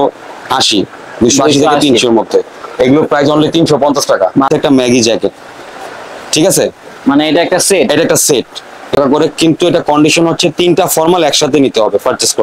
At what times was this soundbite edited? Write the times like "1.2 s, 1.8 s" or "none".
4.5 s, 8.9 s